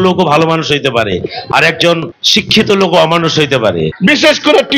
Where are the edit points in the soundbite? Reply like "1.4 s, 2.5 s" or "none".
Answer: 2.2 s, 3.9 s